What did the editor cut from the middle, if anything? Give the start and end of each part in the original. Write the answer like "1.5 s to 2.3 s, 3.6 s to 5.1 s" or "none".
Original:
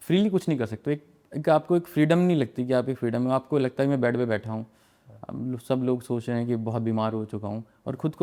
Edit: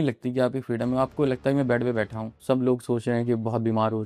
4.7 s to 5.6 s